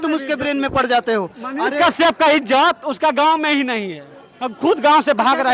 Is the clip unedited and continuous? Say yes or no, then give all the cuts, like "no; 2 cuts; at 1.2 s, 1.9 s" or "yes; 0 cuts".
yes; 0 cuts